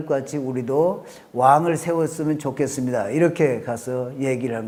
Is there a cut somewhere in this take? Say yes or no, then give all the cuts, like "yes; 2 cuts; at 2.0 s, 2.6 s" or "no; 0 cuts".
no; 0 cuts